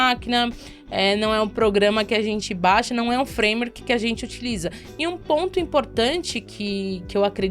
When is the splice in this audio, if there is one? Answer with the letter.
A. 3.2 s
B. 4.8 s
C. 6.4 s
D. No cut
B